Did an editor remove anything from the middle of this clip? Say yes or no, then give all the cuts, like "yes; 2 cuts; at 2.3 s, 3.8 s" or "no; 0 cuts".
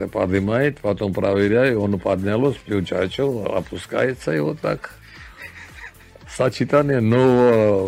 no; 0 cuts